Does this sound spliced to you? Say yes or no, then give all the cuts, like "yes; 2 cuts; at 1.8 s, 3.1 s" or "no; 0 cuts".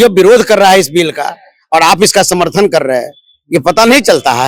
no; 0 cuts